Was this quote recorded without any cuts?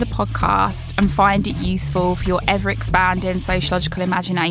yes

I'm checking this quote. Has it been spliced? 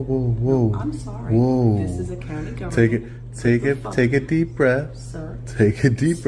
no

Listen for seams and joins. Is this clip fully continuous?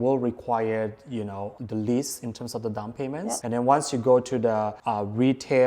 no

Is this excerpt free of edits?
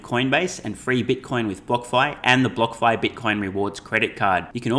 yes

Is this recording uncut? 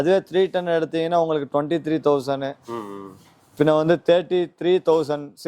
yes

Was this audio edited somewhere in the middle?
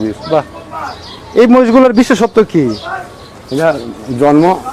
no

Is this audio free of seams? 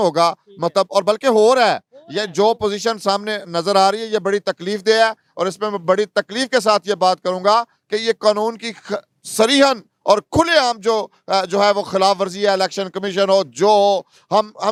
yes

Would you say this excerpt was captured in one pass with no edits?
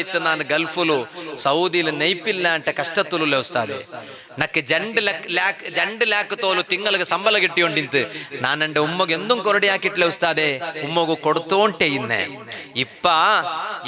yes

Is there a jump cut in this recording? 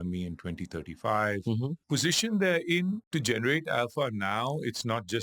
yes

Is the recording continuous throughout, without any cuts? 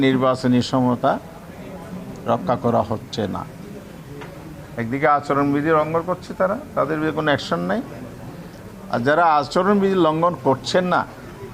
yes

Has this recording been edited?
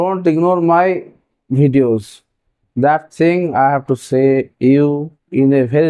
yes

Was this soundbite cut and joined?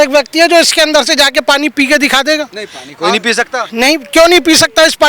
no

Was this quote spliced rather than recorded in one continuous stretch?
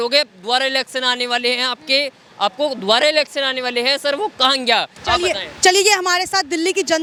no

